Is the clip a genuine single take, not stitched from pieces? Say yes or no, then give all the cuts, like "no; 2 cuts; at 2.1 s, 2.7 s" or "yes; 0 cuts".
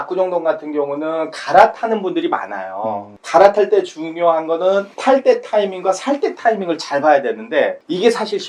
yes; 0 cuts